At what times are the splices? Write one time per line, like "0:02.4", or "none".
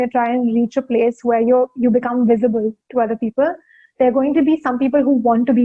none